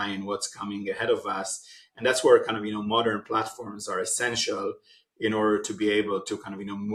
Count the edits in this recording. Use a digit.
0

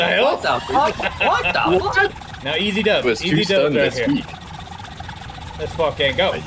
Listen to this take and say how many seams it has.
1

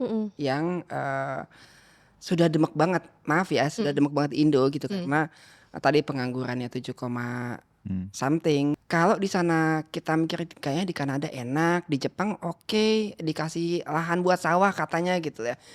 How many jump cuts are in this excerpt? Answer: 1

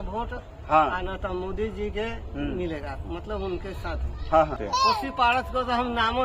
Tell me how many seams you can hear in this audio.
1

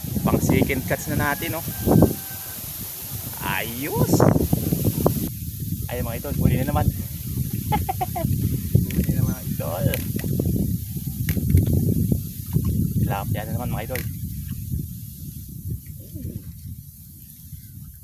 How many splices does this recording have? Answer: 1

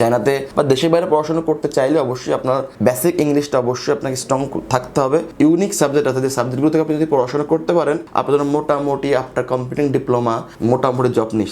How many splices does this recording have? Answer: 1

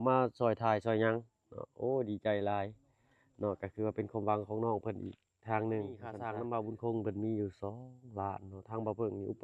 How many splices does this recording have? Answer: 1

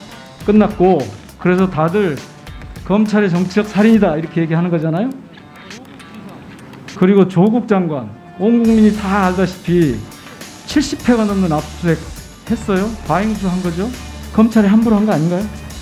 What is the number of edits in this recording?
0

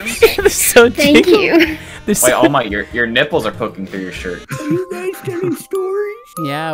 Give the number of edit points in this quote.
1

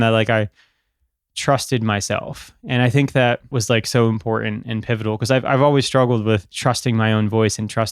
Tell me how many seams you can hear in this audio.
2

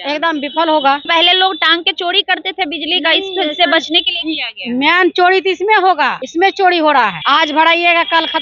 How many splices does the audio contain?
3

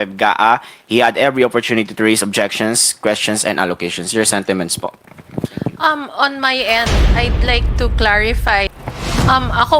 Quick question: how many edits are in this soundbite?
1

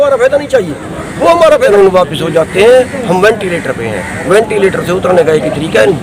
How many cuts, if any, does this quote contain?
1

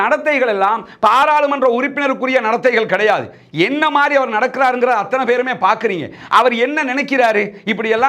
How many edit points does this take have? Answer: 0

